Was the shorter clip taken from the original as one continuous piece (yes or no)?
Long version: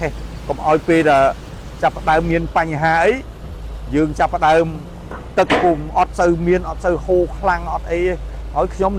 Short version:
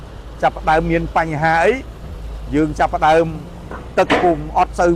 yes